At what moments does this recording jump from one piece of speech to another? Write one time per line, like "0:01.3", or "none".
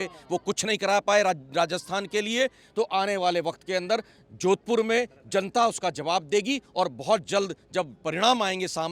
none